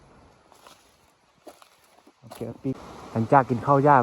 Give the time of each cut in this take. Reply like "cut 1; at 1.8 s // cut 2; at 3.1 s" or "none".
cut 1; at 2.7 s